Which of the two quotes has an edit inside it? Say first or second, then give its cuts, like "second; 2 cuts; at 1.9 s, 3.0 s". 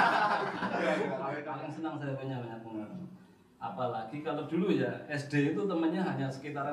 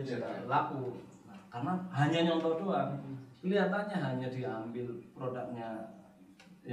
first; 1 cut; at 1.2 s